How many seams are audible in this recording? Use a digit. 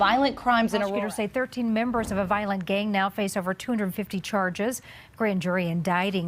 1